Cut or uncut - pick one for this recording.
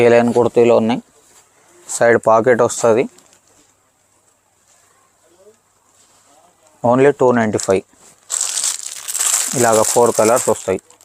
uncut